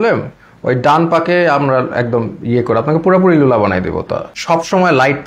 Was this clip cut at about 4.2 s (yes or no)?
yes